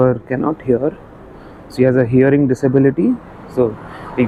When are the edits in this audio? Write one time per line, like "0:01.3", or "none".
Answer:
none